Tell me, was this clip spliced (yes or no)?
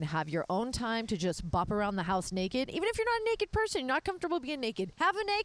no